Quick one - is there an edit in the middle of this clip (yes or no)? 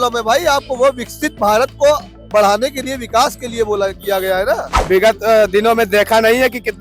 yes